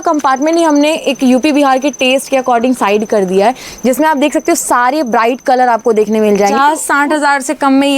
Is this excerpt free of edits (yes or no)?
no